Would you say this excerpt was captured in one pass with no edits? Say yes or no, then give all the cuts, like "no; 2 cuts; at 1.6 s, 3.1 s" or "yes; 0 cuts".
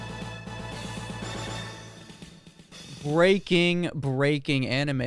yes; 0 cuts